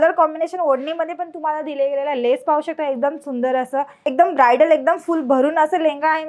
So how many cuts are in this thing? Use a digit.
1